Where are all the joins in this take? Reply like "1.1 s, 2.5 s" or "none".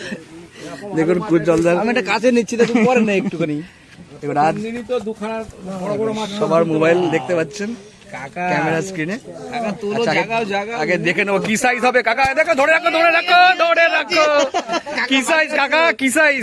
none